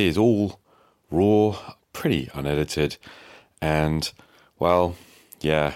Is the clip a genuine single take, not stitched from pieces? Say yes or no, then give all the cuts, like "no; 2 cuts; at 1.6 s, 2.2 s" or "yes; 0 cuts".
no; 1 cut; at 1.7 s